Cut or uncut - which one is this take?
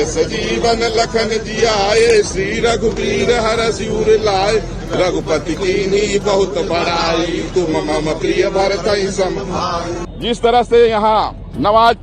cut